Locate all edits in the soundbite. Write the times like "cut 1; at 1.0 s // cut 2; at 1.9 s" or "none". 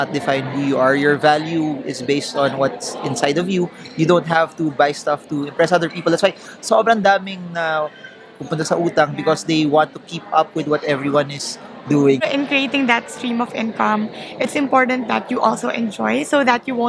cut 1; at 12.2 s